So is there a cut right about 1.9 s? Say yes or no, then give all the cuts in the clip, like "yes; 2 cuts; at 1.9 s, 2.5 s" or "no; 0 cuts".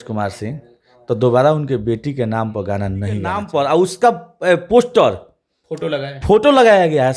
no; 1 cut; at 3.4 s